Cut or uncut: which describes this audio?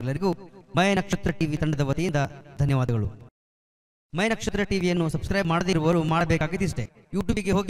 uncut